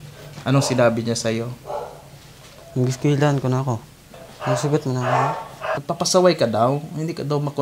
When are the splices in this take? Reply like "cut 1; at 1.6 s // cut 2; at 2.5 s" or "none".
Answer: cut 1; at 4.1 s // cut 2; at 5.8 s